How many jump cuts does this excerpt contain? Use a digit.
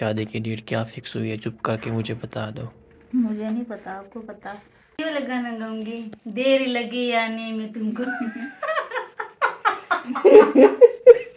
1